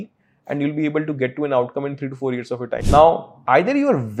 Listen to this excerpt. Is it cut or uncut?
cut